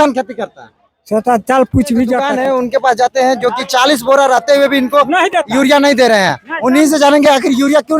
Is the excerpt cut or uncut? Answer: cut